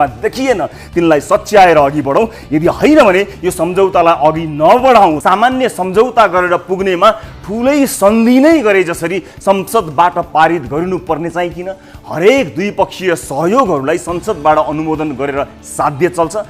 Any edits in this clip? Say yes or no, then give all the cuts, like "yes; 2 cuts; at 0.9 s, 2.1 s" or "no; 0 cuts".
yes; 1 cut; at 5.2 s